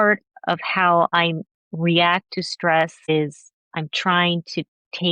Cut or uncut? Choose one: cut